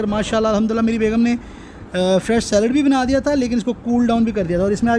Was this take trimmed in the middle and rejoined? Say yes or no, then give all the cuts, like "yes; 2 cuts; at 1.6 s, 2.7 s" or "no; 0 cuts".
no; 0 cuts